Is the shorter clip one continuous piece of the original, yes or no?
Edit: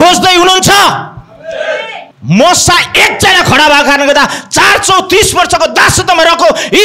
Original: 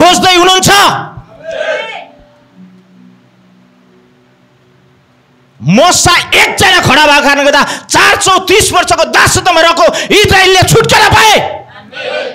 no